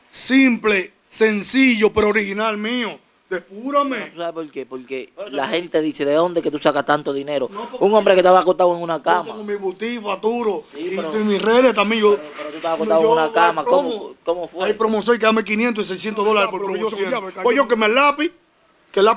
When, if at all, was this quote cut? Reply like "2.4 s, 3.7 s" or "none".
4.1 s, 17.3 s